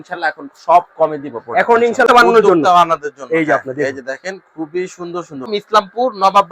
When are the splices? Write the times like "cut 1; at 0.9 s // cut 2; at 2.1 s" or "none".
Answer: cut 1; at 2.1 s // cut 2; at 5.5 s